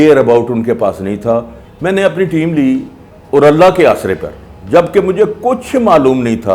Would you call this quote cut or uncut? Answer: cut